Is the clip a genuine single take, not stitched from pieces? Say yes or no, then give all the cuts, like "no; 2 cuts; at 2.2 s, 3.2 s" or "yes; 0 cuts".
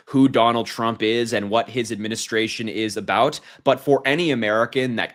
yes; 0 cuts